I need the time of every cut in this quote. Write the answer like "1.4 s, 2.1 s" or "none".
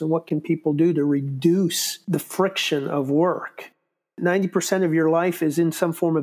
2.0 s, 3.9 s